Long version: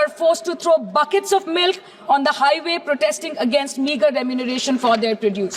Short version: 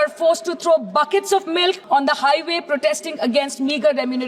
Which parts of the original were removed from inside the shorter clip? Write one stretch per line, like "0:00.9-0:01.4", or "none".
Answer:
0:01.8-0:02.0